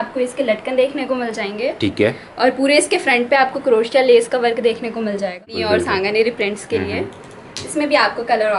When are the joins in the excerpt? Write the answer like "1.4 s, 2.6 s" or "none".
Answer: 5.6 s